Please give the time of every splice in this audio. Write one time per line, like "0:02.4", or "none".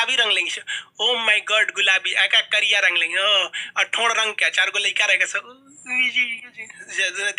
none

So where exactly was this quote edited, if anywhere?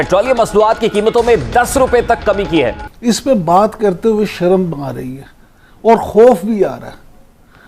0:02.8

